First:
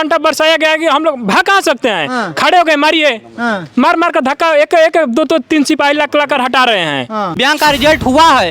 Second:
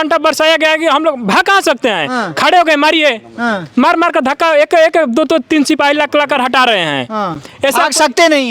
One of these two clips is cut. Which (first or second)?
first